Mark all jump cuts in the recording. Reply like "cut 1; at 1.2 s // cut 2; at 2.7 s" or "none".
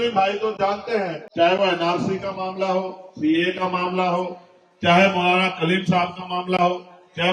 cut 1; at 1.2 s

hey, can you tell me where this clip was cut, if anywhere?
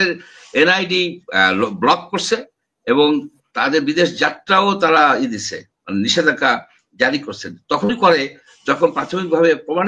none

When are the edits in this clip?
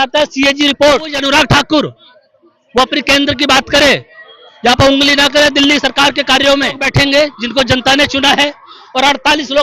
cut 1; at 1.2 s // cut 2; at 6.8 s

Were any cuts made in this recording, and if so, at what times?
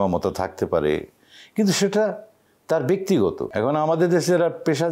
cut 1; at 3.5 s

